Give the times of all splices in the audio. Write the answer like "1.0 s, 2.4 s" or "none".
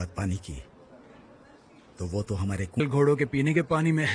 2.8 s